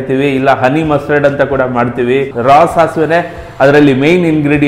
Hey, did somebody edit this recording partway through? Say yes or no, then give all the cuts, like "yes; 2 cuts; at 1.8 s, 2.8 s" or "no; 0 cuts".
yes; 1 cut; at 2.3 s